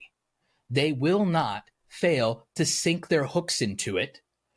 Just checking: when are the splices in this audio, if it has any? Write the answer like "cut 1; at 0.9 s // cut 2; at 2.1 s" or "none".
none